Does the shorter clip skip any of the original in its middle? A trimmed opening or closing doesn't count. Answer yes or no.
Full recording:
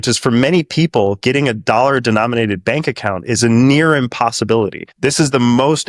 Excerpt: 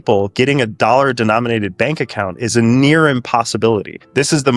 no